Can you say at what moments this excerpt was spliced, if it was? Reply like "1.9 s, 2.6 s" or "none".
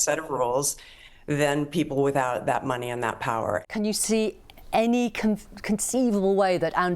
3.6 s